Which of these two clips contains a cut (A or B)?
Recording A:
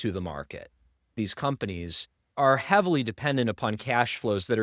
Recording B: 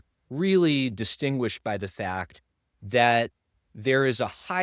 A